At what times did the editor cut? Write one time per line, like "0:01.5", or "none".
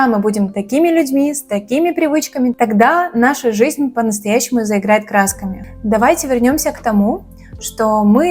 none